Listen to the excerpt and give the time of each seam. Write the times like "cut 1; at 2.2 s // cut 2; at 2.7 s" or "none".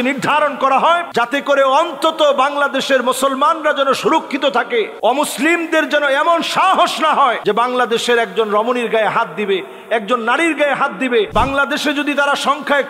cut 1; at 11.3 s

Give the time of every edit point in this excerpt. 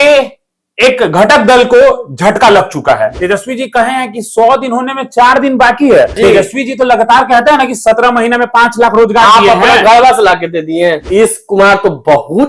cut 1; at 3.1 s // cut 2; at 6.2 s // cut 3; at 11.1 s

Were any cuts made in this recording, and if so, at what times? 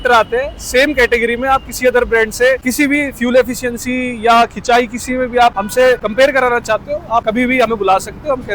cut 1; at 2.7 s // cut 2; at 5.9 s // cut 3; at 7.2 s

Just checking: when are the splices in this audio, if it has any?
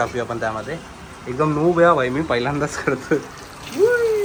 none

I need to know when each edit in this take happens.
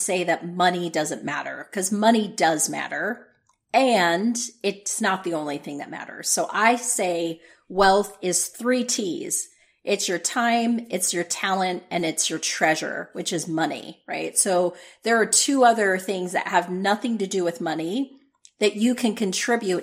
cut 1; at 8.5 s

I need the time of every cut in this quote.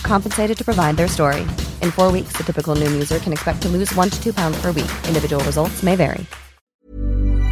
cut 1; at 6.6 s

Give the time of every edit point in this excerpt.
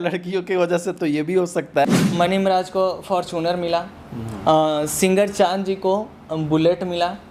cut 1; at 1.9 s

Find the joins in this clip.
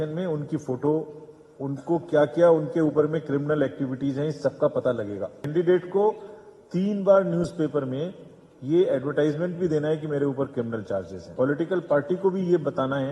cut 1; at 5.4 s // cut 2; at 11.2 s

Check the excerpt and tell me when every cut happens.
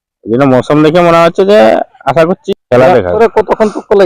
cut 1; at 2.4 s // cut 2; at 3.1 s

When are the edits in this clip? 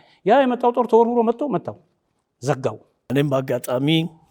cut 1; at 3.1 s

